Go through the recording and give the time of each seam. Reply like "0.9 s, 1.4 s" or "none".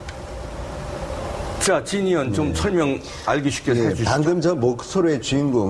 2.2 s